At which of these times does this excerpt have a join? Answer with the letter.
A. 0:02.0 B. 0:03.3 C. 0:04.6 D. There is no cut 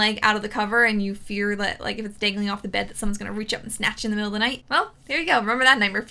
C